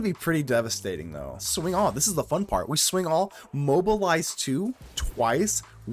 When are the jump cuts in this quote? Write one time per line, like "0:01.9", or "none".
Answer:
0:01.5